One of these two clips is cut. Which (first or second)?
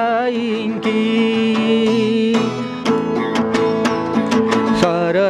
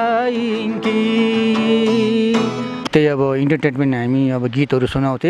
second